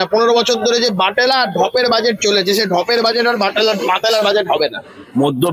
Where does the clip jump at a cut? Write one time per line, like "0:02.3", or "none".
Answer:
0:04.5